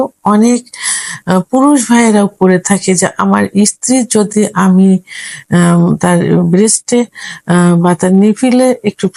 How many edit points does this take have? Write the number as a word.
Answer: zero